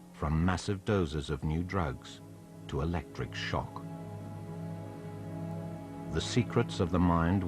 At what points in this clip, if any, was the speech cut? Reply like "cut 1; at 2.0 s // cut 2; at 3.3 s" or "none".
cut 1; at 1.8 s

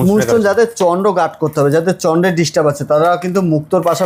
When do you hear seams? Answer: none

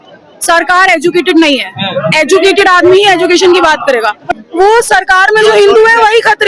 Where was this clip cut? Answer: cut 1; at 4.3 s

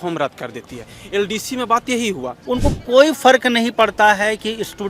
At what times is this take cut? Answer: cut 1; at 2.3 s

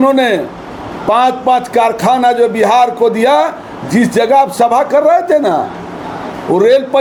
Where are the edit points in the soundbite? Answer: none

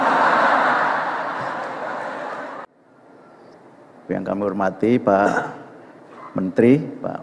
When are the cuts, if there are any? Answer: cut 1; at 2.6 s

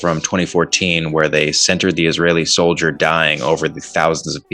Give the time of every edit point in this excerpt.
none

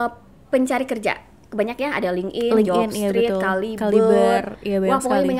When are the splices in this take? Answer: none

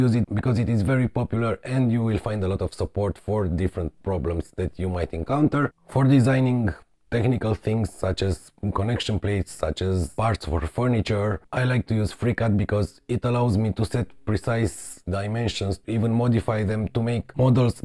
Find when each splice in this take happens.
none

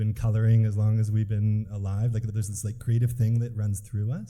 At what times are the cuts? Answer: cut 1; at 2.3 s

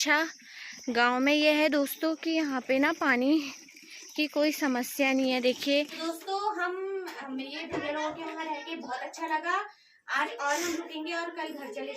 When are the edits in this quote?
cut 1; at 6.0 s

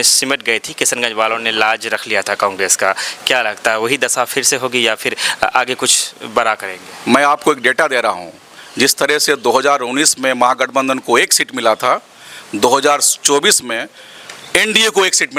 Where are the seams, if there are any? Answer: none

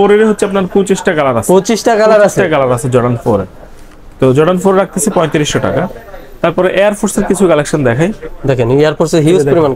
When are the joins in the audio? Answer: none

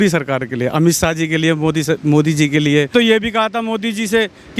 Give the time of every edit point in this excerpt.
cut 1; at 2.9 s

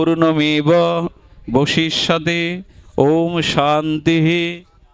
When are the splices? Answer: none

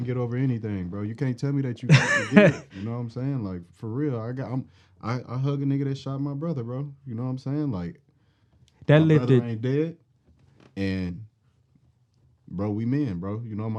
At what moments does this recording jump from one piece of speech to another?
none

